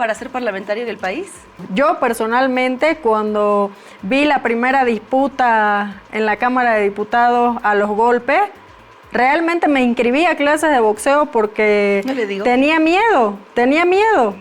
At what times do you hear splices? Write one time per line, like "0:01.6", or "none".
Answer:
0:01.6